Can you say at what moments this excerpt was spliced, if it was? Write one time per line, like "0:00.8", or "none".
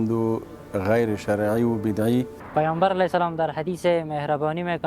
0:02.4

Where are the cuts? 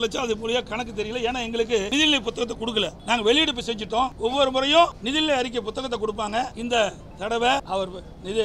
0:01.9
0:03.0
0:04.1
0:05.0
0:06.6
0:07.6

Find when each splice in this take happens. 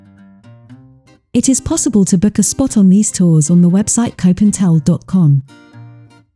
0:05.5

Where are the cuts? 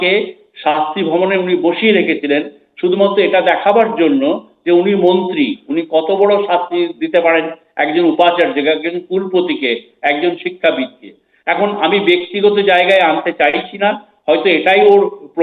none

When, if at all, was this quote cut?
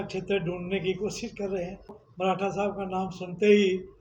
0:02.0

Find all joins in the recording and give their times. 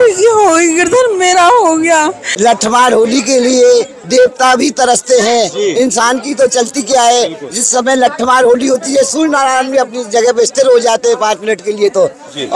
0:02.2

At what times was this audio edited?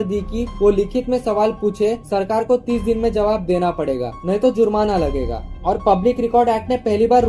none

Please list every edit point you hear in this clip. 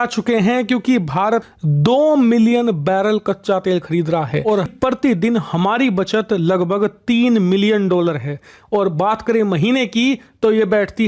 none

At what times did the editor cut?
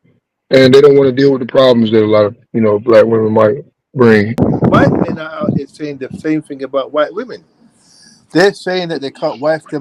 0:04.3

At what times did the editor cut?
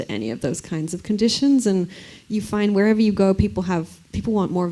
none

